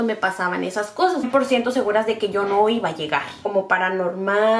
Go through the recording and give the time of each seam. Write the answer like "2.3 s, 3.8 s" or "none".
1.3 s, 3.3 s